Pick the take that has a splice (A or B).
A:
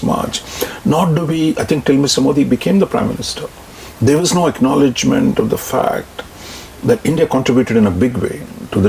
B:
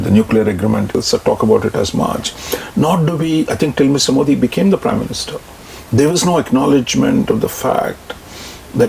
B